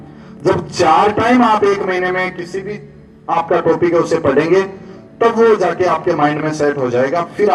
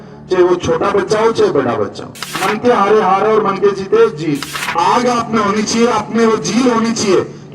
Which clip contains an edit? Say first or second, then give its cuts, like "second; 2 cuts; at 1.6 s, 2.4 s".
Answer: second; 2 cuts; at 2.4 s, 4.6 s